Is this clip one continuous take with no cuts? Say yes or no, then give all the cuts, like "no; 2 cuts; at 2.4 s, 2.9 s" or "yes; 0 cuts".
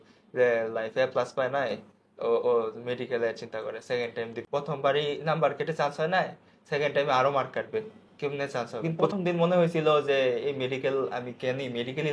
no; 2 cuts; at 4.4 s, 9.1 s